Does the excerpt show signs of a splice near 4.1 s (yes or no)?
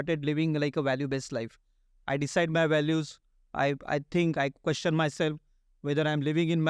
no